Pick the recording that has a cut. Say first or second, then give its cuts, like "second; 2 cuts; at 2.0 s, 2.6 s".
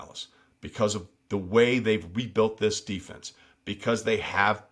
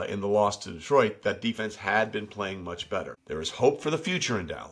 second; 1 cut; at 3.2 s